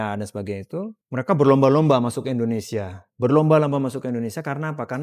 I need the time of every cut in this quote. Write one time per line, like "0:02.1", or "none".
0:01.0